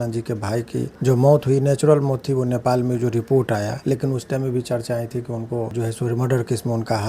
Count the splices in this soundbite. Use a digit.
2